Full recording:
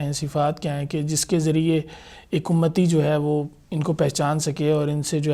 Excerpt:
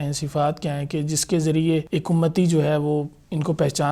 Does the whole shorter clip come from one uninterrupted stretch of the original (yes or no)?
no